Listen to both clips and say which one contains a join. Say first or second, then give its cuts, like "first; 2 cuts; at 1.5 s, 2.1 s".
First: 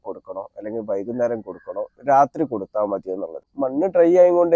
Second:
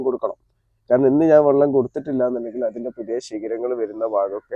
first; 1 cut; at 3.4 s